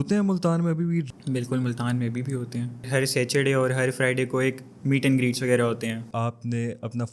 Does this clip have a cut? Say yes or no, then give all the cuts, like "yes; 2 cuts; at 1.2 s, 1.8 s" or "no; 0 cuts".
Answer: yes; 2 cuts; at 2.9 s, 6.1 s